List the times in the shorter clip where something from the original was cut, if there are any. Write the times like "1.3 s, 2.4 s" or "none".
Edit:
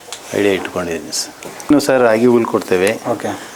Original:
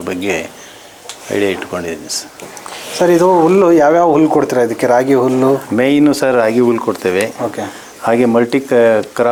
1.7 s